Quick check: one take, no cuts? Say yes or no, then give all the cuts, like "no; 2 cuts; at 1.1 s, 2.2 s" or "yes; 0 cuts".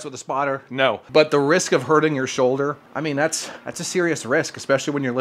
no; 2 cuts; at 1.0 s, 2.9 s